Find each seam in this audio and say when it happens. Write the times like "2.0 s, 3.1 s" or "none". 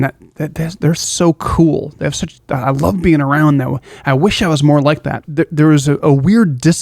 5.2 s